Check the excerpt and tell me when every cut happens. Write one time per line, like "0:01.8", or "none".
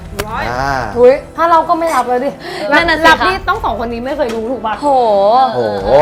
none